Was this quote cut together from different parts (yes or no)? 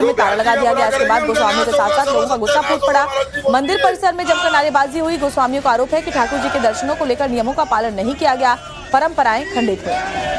yes